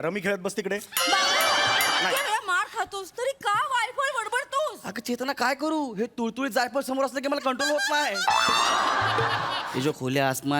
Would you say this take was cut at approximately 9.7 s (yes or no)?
yes